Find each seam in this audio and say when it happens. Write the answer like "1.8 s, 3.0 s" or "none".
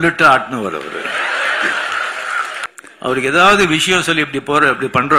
2.6 s